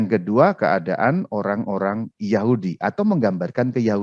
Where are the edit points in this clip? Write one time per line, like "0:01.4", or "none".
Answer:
none